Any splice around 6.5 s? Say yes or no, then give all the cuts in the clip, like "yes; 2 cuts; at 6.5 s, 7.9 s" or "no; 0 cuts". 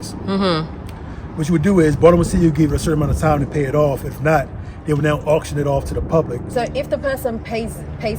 yes; 1 cut; at 6.5 s